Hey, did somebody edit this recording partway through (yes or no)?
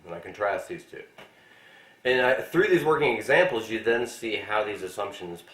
yes